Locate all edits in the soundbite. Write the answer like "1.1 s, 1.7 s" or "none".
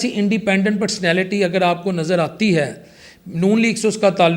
none

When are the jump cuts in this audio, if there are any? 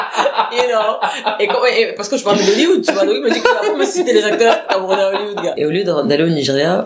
5.6 s

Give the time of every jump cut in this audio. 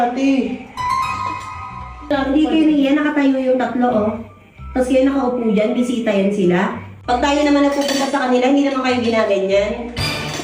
2.1 s

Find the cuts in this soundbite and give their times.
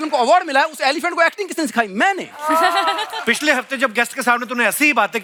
none

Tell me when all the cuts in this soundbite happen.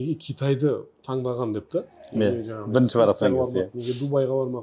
none

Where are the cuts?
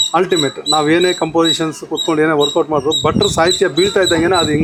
none

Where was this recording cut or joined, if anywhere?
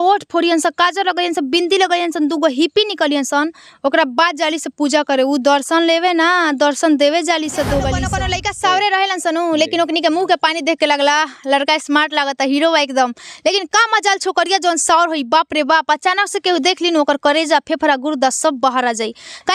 8.1 s

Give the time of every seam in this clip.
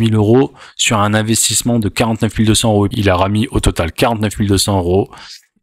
2.9 s

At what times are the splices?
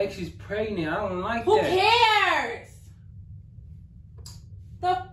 none

